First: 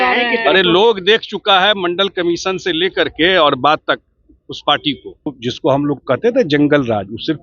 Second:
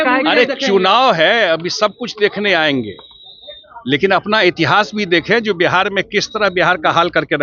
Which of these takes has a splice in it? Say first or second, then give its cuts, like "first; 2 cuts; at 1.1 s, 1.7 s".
first; 1 cut; at 5.4 s